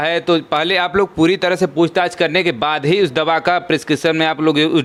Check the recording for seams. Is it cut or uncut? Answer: uncut